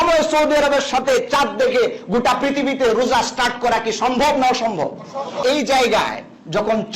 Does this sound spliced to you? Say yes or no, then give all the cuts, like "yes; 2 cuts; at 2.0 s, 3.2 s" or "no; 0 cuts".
yes; 1 cut; at 5.4 s